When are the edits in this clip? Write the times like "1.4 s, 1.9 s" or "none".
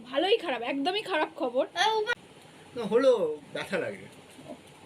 2.1 s